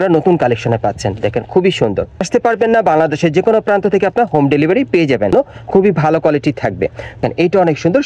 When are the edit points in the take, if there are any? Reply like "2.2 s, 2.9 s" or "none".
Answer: 2.2 s, 5.3 s, 7.2 s